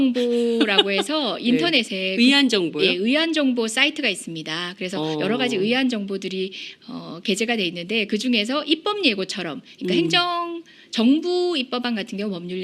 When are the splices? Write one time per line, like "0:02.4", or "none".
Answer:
0:08.0